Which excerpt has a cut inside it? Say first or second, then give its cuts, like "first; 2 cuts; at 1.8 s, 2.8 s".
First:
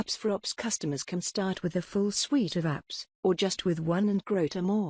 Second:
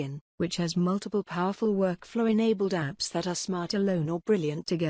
first; 1 cut; at 3.5 s